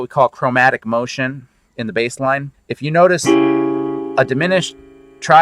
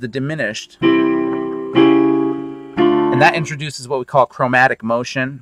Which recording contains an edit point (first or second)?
first